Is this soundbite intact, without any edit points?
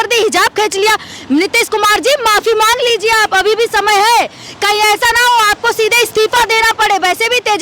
yes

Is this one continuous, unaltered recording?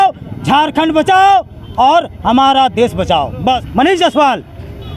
no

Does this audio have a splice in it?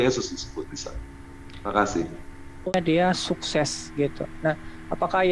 yes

